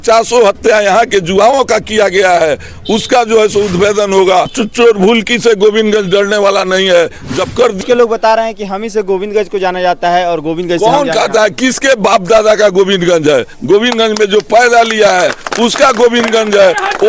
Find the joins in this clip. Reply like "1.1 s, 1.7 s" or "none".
4.5 s, 7.8 s